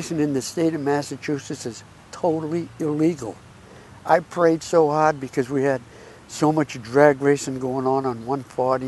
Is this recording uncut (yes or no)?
yes